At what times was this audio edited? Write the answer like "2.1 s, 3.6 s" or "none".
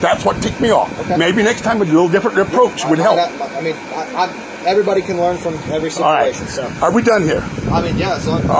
none